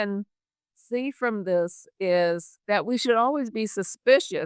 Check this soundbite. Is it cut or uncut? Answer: cut